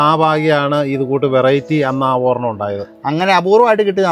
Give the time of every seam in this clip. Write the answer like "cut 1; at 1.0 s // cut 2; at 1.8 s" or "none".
none